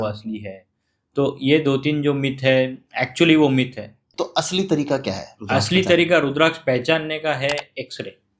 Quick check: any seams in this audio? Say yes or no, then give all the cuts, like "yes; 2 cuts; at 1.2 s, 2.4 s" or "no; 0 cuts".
yes; 1 cut; at 4.0 s